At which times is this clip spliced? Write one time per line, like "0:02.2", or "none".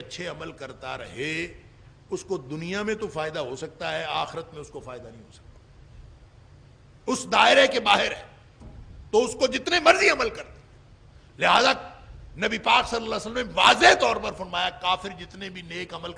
none